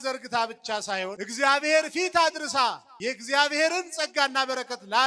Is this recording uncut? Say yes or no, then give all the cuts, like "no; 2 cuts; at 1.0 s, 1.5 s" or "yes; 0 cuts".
no; 2 cuts; at 1.2 s, 2.9 s